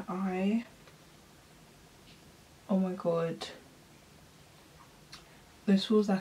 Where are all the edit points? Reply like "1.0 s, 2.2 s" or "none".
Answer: none